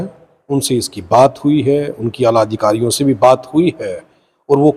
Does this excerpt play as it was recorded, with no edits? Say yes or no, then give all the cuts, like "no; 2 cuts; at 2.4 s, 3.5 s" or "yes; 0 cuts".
yes; 0 cuts